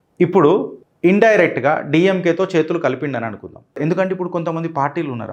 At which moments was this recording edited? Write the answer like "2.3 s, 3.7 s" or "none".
3.6 s